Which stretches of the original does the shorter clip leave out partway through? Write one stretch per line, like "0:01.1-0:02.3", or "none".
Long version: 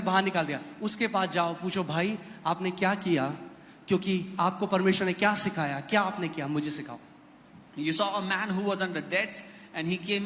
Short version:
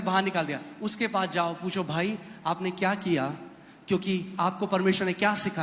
none